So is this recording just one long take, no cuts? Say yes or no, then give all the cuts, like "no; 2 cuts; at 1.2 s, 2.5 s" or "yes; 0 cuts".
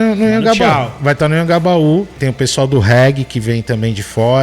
no; 1 cut; at 2.2 s